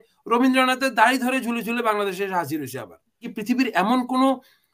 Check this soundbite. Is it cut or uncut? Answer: cut